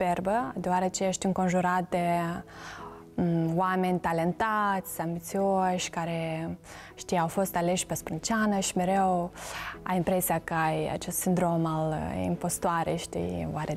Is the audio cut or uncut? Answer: uncut